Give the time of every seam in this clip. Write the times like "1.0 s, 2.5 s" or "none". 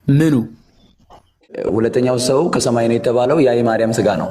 1.6 s